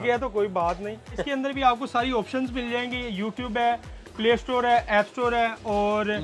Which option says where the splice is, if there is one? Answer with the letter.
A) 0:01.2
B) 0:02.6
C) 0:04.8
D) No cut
A